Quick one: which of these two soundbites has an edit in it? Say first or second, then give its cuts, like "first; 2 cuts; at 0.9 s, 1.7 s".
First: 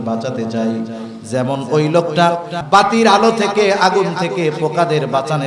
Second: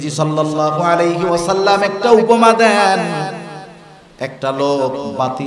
first; 1 cut; at 2.6 s